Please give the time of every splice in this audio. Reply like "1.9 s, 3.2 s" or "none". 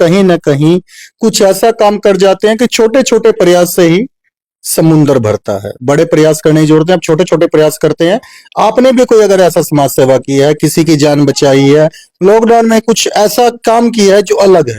none